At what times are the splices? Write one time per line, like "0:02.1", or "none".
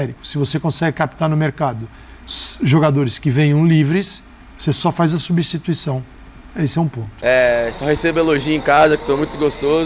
0:07.1